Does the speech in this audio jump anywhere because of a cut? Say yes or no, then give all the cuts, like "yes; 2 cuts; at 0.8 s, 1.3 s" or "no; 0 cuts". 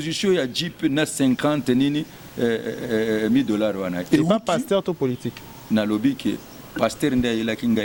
no; 0 cuts